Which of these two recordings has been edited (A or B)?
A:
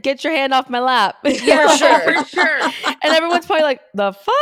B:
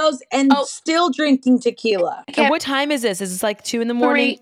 B